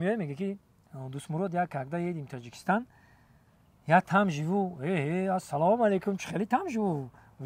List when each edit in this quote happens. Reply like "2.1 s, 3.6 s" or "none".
none